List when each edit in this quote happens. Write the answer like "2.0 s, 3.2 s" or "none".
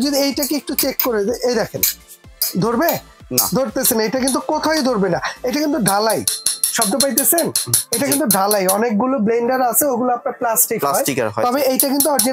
none

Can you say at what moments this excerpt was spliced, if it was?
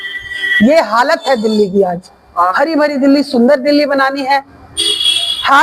2.5 s

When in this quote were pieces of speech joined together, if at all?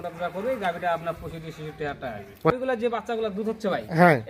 2.4 s

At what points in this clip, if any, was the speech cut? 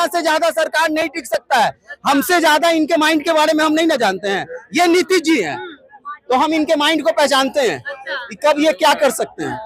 none

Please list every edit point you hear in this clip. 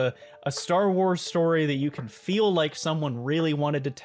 none

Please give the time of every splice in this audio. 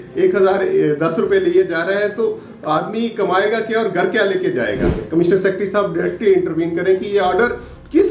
5.0 s

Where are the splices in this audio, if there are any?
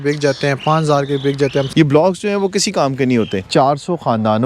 1.7 s, 3.5 s

